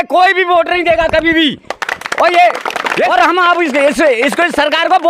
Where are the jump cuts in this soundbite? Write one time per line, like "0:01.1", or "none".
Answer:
0:03.1